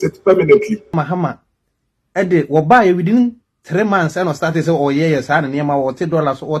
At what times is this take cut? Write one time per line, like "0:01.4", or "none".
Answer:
0:00.9